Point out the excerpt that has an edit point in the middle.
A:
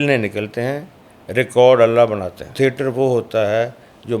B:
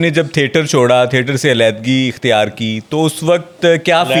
A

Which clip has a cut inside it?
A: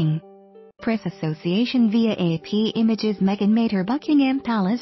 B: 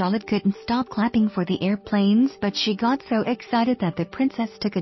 A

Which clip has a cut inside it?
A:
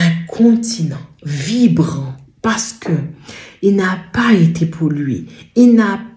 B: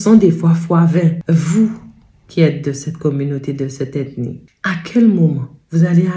B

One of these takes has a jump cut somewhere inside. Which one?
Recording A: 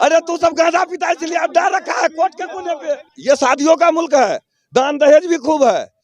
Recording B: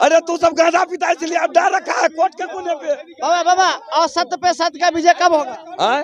A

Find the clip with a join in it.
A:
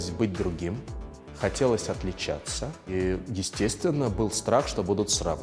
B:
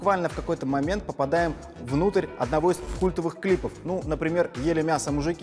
A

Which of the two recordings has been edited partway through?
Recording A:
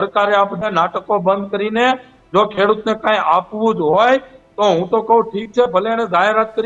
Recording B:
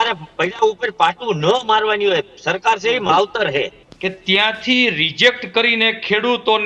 B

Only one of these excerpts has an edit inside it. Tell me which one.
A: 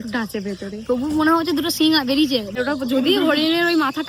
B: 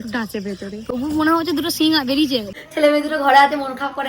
B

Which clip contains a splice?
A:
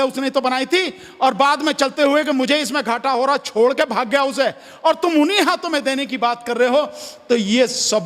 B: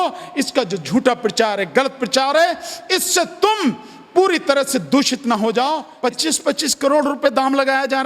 B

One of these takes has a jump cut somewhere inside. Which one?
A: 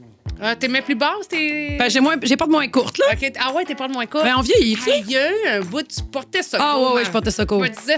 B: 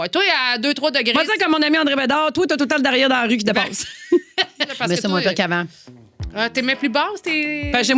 B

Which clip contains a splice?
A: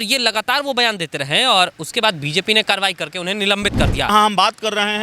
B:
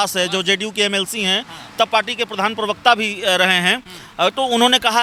A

